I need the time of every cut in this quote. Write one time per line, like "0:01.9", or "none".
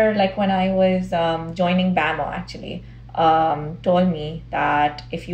none